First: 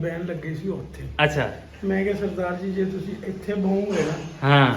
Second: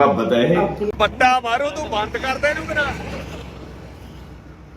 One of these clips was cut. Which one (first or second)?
second